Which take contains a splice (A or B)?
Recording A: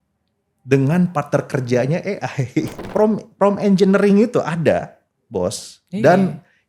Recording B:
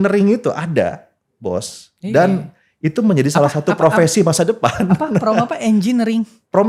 A